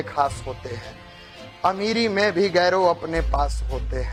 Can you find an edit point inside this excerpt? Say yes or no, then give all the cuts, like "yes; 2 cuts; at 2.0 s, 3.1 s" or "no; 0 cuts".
no; 0 cuts